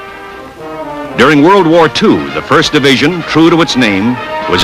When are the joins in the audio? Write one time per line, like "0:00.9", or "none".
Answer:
0:03.1